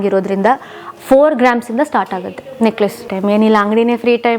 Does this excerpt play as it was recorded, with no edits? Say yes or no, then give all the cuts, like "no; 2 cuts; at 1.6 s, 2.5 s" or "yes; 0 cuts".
no; 1 cut; at 3.0 s